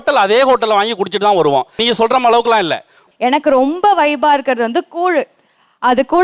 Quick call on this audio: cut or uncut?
cut